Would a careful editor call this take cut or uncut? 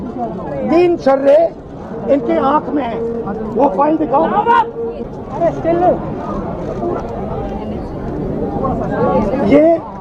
uncut